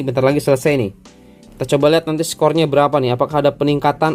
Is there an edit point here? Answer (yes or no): no